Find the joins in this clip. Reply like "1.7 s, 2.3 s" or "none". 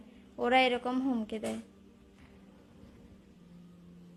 none